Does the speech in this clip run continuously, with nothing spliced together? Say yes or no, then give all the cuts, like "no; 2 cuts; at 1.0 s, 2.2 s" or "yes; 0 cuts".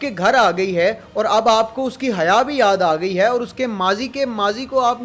yes; 0 cuts